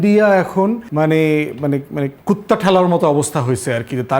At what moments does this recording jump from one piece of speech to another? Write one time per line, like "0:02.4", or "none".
0:00.9
0:02.1

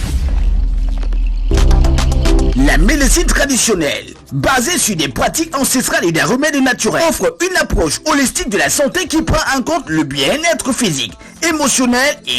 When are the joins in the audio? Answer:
0:03.1

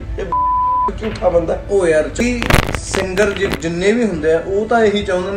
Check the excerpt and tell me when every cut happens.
0:02.1

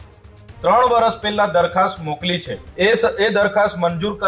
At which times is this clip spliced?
0:02.6

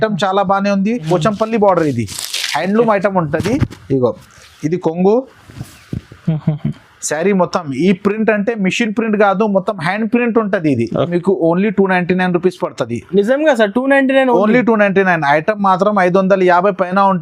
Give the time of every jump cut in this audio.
0:01.0
0:11.1

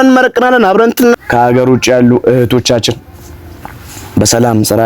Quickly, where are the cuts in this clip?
0:01.2

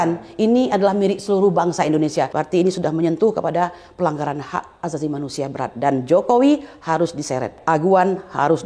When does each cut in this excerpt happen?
0:02.4
0:07.6

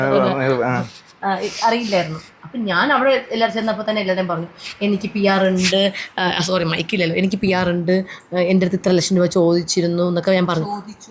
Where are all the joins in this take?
none

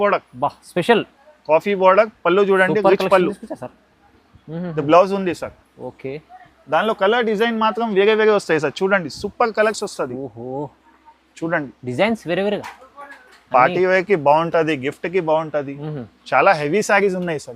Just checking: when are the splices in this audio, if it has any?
none

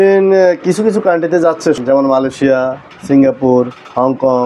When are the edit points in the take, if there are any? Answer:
0:01.8

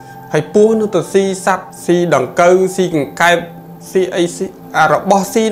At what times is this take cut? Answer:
0:01.7
0:04.6

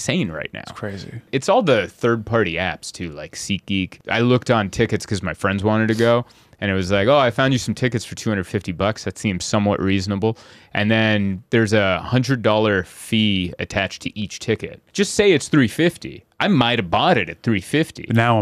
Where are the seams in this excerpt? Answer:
0:01.3
0:03.9
0:14.8

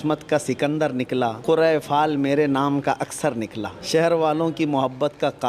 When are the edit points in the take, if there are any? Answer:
0:01.4
0:03.7

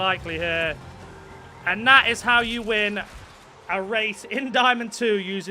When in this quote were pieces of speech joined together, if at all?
none

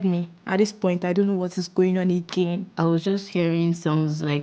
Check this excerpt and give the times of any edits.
0:02.6

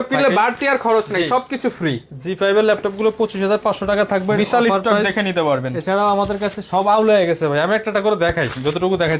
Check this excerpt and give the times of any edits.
none

